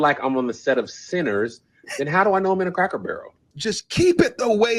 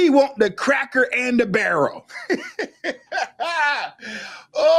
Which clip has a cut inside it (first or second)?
first